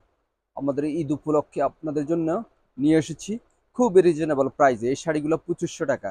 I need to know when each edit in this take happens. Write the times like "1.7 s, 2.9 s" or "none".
none

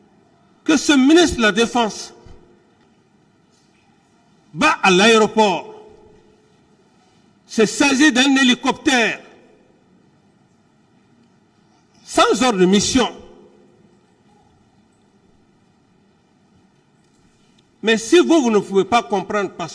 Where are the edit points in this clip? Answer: 2.8 s

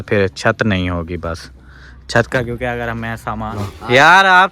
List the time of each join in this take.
3.5 s

